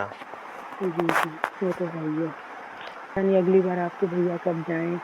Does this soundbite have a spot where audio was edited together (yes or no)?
yes